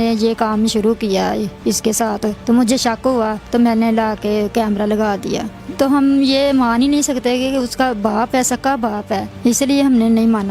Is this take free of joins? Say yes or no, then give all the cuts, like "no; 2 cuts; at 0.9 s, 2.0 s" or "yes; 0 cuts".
no; 4 cuts; at 2.4 s, 3.4 s, 5.6 s, 9.3 s